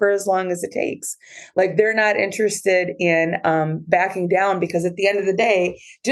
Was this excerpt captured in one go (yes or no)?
yes